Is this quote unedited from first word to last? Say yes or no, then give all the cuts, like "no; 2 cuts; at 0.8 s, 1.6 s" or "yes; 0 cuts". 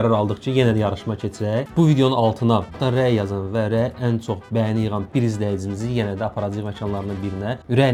yes; 0 cuts